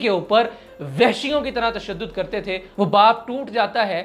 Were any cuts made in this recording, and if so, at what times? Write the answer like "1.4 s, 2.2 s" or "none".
2.7 s